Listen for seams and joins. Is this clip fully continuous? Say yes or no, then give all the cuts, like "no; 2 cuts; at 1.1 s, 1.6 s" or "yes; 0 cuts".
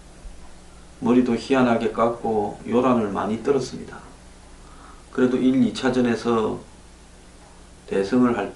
yes; 0 cuts